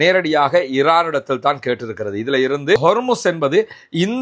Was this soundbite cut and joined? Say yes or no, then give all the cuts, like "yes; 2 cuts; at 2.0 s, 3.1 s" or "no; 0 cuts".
no; 0 cuts